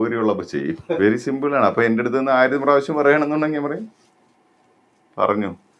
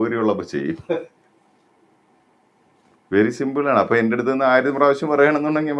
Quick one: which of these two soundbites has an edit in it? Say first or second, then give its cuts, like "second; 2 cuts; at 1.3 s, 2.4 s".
first; 1 cut; at 1.0 s